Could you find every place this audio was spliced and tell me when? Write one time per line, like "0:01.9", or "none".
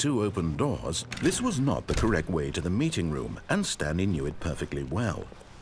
0:01.2